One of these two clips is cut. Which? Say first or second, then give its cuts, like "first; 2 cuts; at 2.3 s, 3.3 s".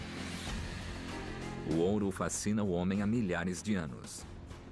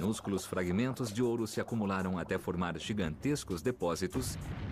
first; 1 cut; at 2.1 s